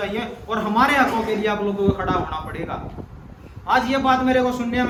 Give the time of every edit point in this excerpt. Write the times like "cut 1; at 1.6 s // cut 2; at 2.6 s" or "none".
none

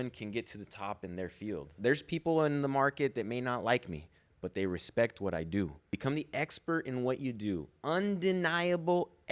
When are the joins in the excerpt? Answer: cut 1; at 1.7 s // cut 2; at 6.0 s

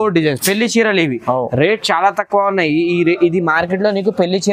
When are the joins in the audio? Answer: none

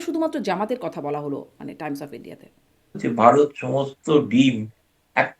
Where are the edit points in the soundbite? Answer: cut 1; at 3.0 s

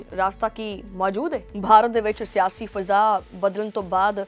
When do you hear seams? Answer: cut 1; at 1.5 s

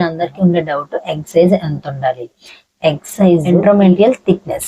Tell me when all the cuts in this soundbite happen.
cut 1; at 3.4 s

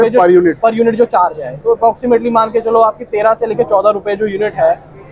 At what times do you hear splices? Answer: none

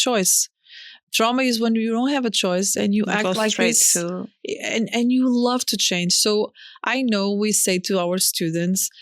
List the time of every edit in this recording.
none

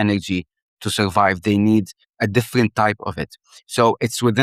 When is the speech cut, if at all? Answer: cut 1; at 2.0 s

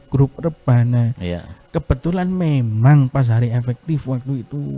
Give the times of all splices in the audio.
none

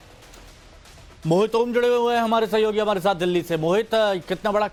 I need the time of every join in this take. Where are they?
none

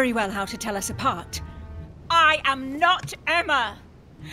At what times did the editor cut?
cut 1; at 1.8 s

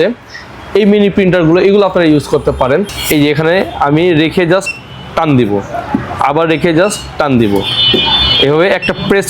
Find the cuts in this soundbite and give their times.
cut 1; at 3.0 s

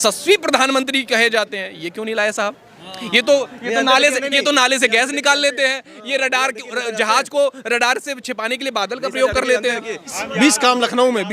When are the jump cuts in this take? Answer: cut 1; at 10.2 s

